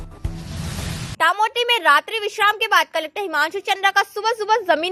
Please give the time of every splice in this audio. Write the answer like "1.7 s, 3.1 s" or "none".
1.1 s